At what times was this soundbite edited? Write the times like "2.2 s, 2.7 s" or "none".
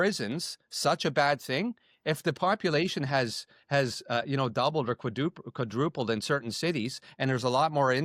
none